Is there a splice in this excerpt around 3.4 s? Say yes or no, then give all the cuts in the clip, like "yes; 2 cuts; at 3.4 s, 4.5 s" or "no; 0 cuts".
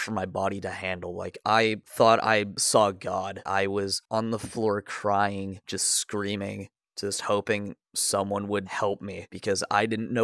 yes; 1 cut; at 3.4 s